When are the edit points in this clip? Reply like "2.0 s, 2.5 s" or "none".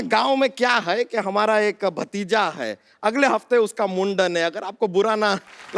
none